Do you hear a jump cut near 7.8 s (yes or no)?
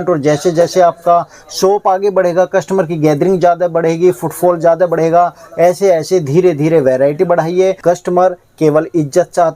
yes